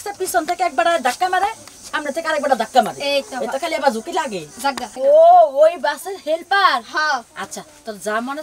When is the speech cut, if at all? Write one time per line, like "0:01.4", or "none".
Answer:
0:04.9